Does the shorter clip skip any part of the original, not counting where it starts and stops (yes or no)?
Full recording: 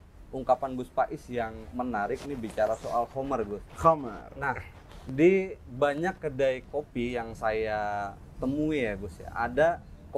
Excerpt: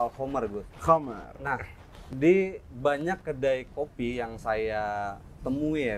no